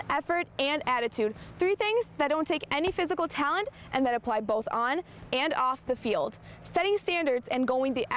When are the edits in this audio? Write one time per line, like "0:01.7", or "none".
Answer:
none

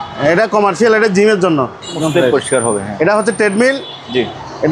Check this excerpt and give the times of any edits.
0:02.0

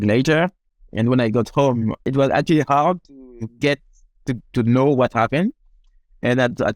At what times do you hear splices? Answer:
0:02.1

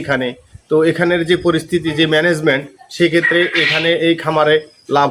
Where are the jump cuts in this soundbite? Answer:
none

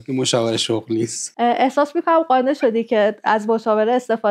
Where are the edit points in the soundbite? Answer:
0:01.2

